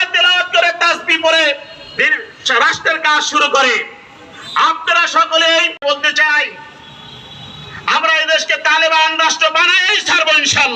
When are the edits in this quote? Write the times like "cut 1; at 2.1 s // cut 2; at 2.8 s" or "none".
cut 1; at 5.8 s